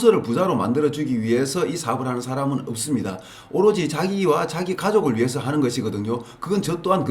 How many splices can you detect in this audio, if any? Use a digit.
0